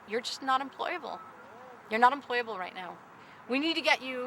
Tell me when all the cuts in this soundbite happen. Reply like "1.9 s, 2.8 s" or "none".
3.1 s